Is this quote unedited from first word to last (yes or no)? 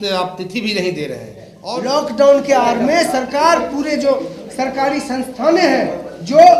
no